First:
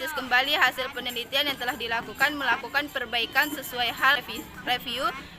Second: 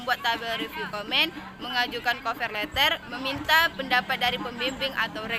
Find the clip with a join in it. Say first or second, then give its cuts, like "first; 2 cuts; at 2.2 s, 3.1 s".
first; 1 cut; at 4.2 s